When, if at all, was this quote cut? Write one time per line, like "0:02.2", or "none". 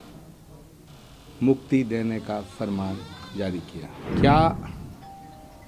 0:04.0

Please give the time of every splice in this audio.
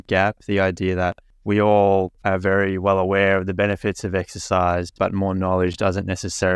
0:01.3
0:02.1

